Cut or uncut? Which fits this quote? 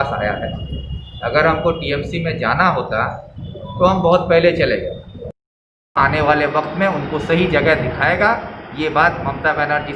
cut